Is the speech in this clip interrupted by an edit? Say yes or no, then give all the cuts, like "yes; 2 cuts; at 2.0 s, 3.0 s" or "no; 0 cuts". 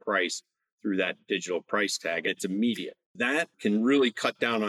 yes; 2 cuts; at 2.3 s, 3.5 s